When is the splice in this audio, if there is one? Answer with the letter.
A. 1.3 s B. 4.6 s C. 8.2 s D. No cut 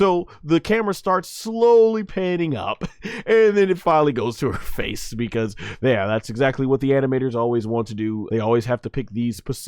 C